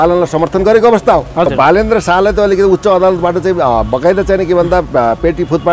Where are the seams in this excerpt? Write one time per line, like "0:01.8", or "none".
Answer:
0:01.5